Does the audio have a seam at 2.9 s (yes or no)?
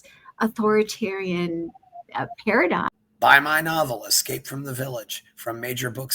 yes